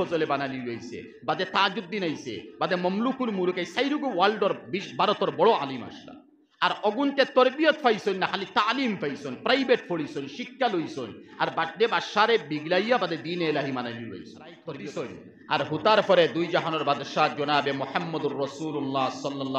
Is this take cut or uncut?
cut